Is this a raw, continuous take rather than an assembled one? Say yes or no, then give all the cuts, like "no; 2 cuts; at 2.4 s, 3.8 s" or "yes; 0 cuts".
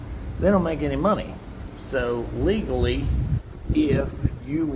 yes; 0 cuts